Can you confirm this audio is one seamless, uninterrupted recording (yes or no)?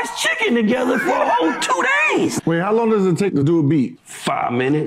no